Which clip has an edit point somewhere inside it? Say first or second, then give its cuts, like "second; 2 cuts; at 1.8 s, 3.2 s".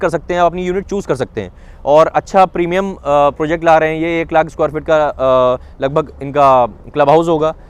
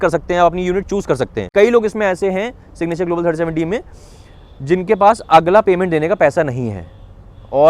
second; 1 cut; at 1.5 s